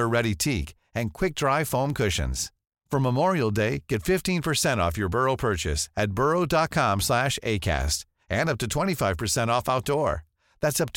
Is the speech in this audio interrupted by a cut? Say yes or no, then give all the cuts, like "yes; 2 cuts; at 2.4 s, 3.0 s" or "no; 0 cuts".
no; 0 cuts